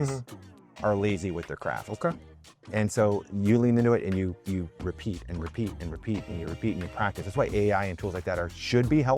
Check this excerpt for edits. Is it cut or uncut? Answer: cut